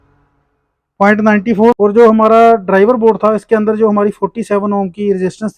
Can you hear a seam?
yes; 1 cut; at 1.8 s

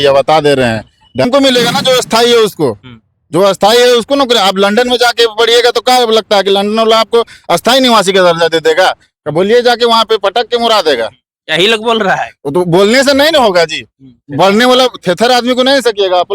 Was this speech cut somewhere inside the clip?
yes; 1 cut; at 1.2 s

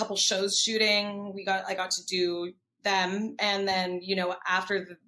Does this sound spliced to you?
no; 0 cuts

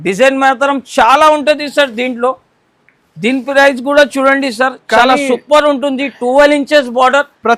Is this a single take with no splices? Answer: yes; 0 cuts

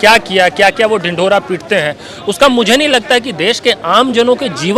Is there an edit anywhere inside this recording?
no; 0 cuts

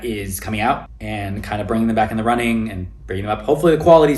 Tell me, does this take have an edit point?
yes; 1 cut; at 0.9 s

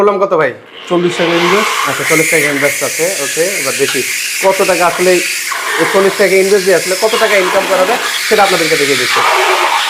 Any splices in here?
no; 0 cuts

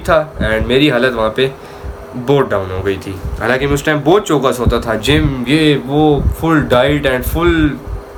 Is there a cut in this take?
no; 0 cuts

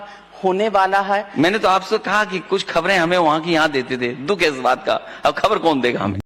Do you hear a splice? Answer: no; 0 cuts

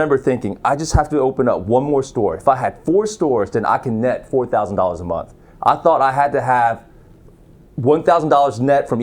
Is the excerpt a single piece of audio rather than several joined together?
yes; 0 cuts

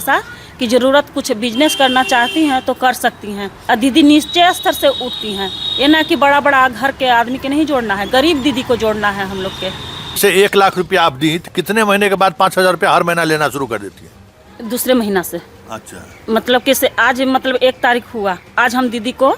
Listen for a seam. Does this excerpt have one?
yes; 2 cuts; at 3.5 s, 10.2 s

